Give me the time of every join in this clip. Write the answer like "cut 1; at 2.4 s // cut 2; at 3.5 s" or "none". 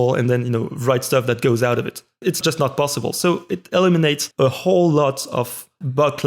cut 1; at 2.4 s // cut 2; at 4.2 s

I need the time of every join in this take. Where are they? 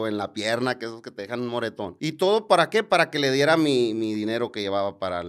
cut 1; at 1.9 s

